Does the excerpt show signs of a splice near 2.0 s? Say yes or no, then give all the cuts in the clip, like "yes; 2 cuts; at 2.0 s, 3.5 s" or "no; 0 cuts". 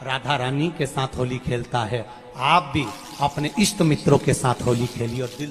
no; 0 cuts